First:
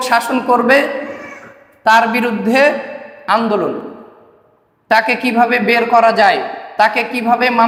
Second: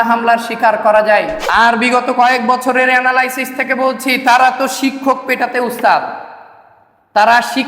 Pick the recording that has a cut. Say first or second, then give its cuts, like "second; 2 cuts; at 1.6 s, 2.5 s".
second; 1 cut; at 1.4 s